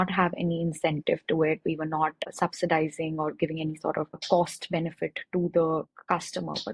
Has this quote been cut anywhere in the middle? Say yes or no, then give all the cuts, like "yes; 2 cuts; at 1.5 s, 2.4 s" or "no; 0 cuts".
yes; 2 cuts; at 2.3 s, 4.2 s